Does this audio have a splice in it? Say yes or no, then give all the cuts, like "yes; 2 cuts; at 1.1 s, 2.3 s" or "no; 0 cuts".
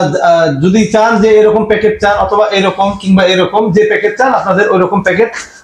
no; 0 cuts